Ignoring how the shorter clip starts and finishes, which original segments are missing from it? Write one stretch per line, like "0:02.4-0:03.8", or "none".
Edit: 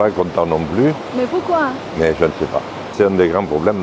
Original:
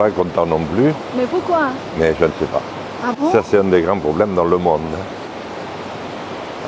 0:02.9-0:03.5